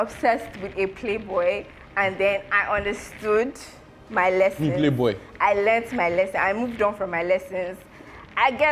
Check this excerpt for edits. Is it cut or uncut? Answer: uncut